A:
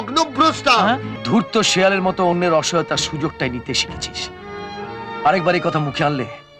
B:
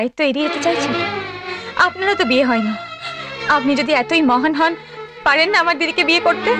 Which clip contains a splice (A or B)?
A